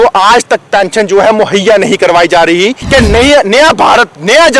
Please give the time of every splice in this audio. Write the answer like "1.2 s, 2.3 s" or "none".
2.8 s